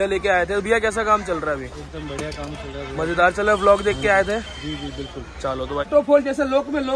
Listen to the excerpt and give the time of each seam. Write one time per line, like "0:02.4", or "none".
0:05.9